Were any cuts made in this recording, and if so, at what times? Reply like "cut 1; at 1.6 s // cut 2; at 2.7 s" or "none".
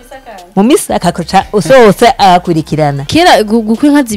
cut 1; at 3.1 s